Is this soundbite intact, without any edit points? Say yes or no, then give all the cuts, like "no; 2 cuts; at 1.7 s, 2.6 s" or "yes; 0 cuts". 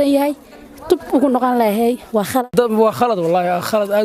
no; 1 cut; at 2.5 s